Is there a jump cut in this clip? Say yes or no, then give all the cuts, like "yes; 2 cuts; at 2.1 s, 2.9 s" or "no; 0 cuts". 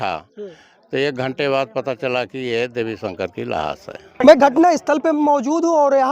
yes; 1 cut; at 4.2 s